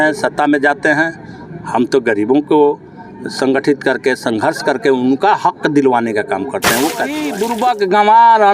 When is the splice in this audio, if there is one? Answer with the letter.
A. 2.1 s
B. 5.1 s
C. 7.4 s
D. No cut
C